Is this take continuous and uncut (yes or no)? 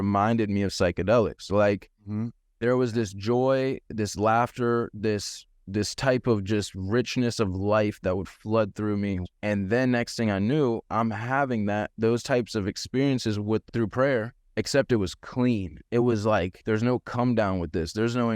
no